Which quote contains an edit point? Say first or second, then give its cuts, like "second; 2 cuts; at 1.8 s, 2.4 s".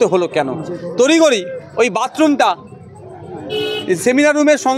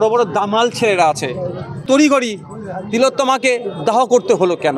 second; 1 cut; at 1.8 s